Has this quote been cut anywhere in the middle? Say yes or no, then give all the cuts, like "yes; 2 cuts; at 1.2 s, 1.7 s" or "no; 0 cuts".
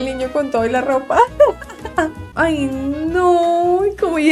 yes; 1 cut; at 2.2 s